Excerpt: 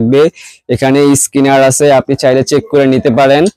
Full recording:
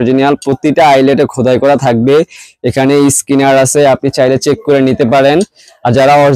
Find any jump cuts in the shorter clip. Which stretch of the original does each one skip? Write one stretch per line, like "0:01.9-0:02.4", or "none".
none